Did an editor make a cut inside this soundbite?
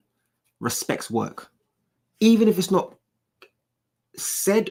no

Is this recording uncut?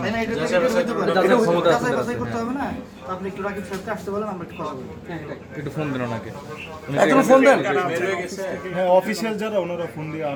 yes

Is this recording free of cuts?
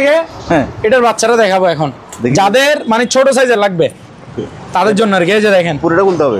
yes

